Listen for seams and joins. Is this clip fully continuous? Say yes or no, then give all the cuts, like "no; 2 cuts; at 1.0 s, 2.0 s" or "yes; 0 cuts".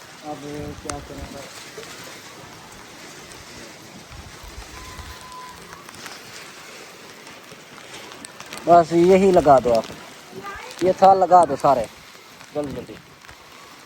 yes; 0 cuts